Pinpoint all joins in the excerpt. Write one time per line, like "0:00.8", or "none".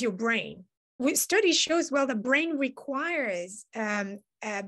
0:00.9